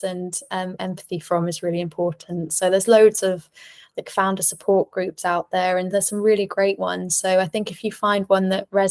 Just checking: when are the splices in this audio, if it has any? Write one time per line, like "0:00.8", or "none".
none